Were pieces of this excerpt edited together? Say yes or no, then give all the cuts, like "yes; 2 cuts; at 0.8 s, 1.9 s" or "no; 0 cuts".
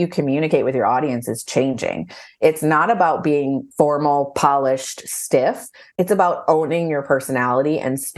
yes; 1 cut; at 3.6 s